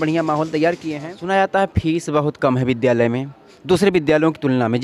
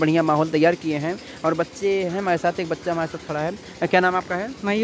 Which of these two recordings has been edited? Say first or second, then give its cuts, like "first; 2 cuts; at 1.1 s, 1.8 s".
first; 1 cut; at 1.1 s